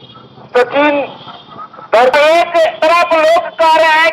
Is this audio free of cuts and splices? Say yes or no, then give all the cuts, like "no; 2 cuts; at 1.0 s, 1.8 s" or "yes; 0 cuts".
no; 1 cut; at 2.1 s